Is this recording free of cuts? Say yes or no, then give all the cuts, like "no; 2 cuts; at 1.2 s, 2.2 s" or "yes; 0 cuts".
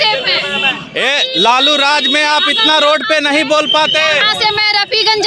yes; 0 cuts